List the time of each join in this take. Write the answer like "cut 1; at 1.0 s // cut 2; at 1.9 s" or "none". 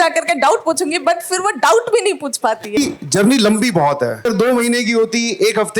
cut 1; at 2.8 s // cut 2; at 4.3 s